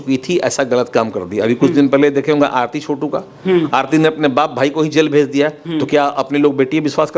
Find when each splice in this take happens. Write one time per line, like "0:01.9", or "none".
none